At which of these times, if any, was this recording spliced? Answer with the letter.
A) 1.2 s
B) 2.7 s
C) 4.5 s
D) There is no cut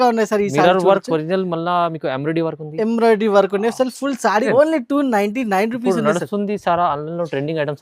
C